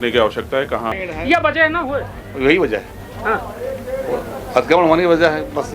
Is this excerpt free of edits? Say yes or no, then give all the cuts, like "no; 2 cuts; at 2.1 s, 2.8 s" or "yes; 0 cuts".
no; 1 cut; at 1.0 s